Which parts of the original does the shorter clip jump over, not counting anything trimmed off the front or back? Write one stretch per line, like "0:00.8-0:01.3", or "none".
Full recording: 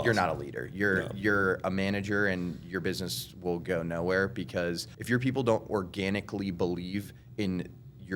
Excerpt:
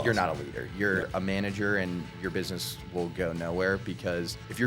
0:01.1-0:01.6